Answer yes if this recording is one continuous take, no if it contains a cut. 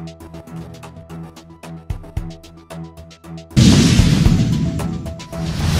yes